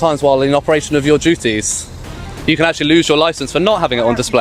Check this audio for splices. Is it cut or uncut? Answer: cut